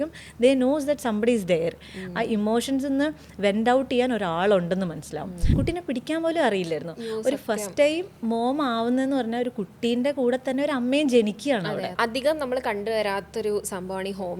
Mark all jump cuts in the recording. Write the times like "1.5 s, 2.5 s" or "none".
5.4 s, 11.9 s